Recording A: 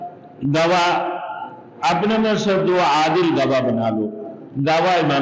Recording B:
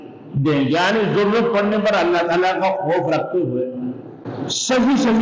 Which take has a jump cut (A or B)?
B